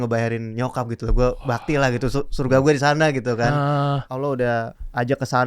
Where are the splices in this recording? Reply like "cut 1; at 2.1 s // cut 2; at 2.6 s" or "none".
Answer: cut 1; at 4.3 s